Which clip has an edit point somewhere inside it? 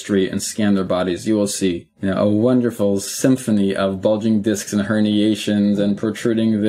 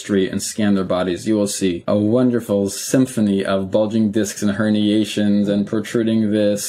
second; 1 cut; at 1.8 s

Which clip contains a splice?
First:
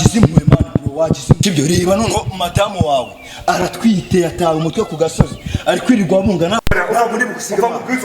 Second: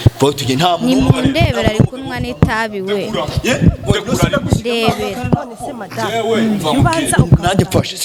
first; 2 cuts; at 1.4 s, 6.6 s

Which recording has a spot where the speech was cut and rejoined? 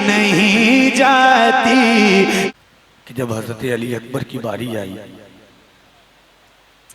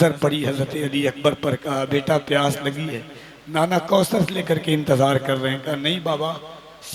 first; 1 cut; at 2.5 s

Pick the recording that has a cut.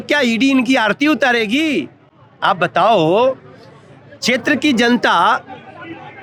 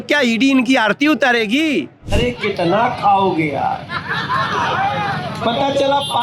second; 1 cut; at 2.1 s

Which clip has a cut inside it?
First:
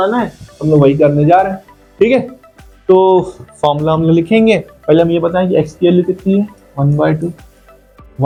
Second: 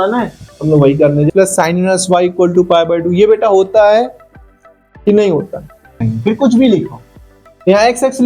second; 2 cuts; at 1.3 s, 6.0 s

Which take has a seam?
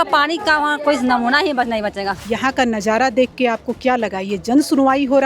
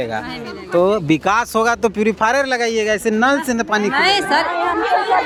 first; 1 cut; at 2.2 s

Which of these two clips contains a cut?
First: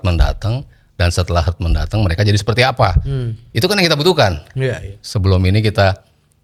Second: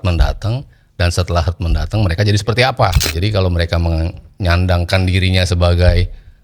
second; 1 cut; at 3.1 s

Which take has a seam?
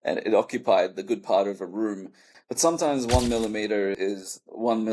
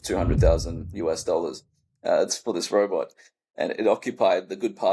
first; 2 cuts; at 2.3 s, 4.0 s

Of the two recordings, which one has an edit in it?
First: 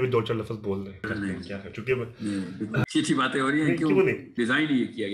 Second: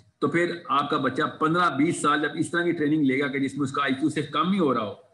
first; 3 cuts; at 1.1 s, 2.9 s, 4.3 s

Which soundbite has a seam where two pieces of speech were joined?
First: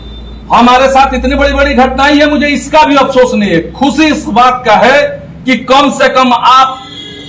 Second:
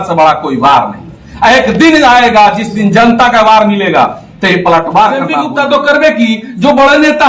second; 1 cut; at 5.5 s

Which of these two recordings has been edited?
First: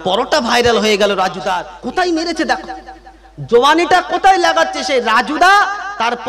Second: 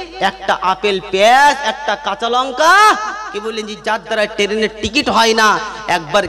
first; 1 cut; at 1.4 s

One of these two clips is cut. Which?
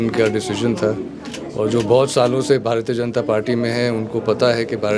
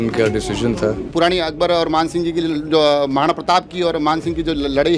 second; 1 cut; at 1.1 s

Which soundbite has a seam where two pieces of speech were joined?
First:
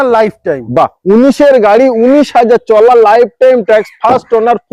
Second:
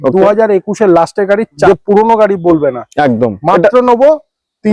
second; 1 cut; at 1.7 s

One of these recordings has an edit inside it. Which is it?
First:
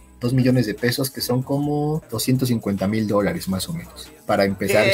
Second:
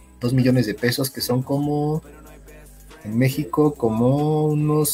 first; 1 cut; at 2.1 s

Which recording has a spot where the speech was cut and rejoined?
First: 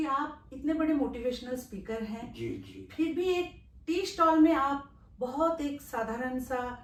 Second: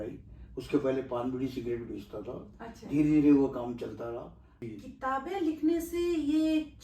second; 1 cut; at 4.7 s

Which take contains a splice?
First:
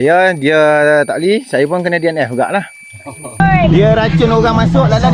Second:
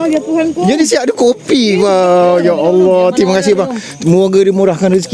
first; 1 cut; at 3.5 s

